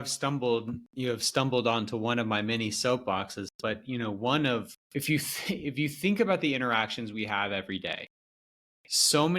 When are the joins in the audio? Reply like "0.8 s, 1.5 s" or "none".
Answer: 4.8 s